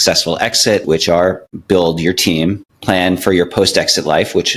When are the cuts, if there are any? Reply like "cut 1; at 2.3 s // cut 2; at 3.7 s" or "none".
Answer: cut 1; at 1.1 s // cut 2; at 2.7 s